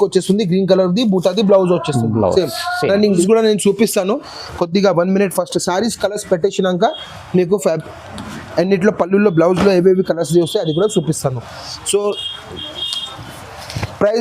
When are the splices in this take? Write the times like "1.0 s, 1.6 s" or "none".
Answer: 3.2 s